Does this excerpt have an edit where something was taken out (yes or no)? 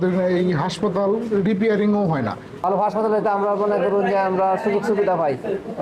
no